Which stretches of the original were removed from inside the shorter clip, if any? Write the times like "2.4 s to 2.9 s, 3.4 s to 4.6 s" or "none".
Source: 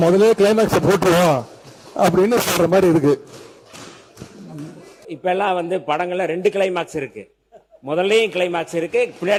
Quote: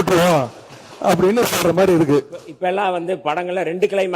3.4 s to 5.0 s